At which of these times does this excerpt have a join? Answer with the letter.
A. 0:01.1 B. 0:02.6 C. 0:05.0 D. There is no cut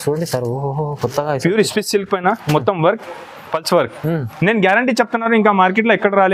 D